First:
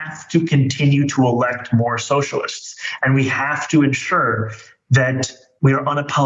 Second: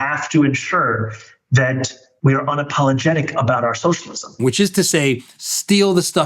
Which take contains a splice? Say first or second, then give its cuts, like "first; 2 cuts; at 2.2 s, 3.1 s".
second; 1 cut; at 4.3 s